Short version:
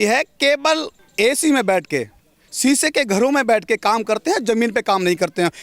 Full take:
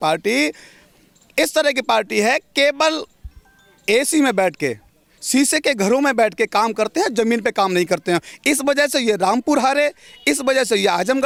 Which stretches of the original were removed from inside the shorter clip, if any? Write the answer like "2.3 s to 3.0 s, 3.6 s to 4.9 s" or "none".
3.1 s to 3.7 s